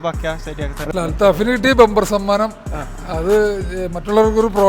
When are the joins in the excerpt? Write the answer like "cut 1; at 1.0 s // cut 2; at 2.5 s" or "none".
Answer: cut 1; at 0.9 s